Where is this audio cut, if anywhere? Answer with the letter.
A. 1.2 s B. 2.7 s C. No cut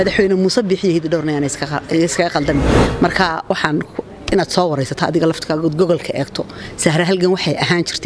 B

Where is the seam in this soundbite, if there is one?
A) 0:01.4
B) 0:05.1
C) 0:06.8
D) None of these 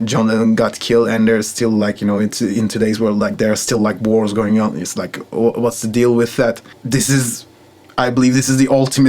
C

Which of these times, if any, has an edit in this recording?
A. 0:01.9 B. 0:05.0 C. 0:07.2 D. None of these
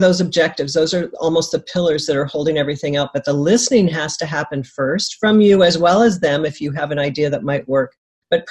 D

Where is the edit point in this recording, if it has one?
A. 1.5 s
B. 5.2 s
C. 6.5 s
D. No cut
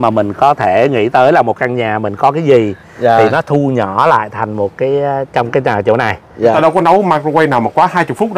C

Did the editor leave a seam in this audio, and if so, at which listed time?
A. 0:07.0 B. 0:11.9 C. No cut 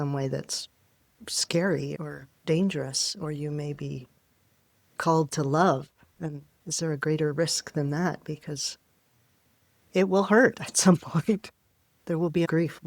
B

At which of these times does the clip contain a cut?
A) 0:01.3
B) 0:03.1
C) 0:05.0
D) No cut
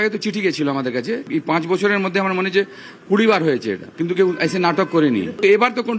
A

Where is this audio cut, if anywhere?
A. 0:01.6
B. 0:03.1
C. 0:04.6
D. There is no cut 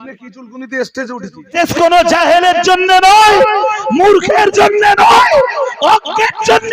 A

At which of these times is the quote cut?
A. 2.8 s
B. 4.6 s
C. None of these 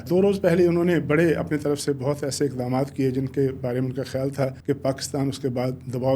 B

